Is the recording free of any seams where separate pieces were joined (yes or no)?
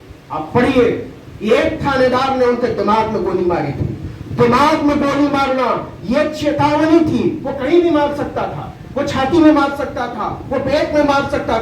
yes